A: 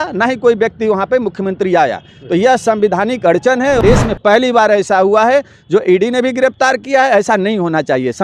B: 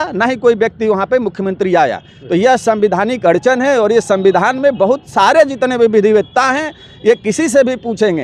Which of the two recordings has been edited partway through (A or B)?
A